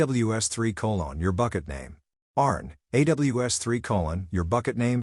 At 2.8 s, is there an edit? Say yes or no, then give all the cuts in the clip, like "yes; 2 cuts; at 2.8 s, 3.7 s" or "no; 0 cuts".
no; 0 cuts